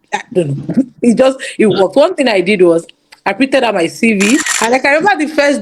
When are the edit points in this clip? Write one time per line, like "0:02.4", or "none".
0:04.5